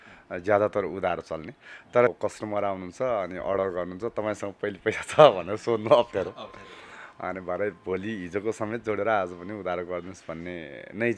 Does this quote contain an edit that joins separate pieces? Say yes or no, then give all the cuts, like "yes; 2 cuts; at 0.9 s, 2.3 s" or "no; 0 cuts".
yes; 1 cut; at 2.1 s